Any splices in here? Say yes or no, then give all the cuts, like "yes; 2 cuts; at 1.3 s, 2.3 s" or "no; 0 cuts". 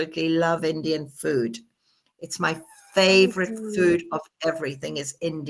no; 0 cuts